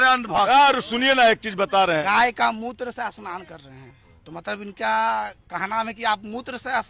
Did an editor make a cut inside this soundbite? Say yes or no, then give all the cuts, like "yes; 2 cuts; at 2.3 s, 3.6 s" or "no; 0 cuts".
yes; 2 cuts; at 2.0 s, 4.1 s